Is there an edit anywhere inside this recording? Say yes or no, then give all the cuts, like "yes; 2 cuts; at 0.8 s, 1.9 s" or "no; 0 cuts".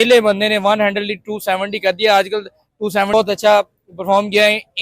yes; 1 cut; at 3.1 s